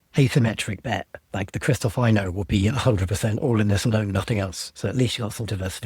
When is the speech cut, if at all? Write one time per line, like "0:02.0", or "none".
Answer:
0:01.2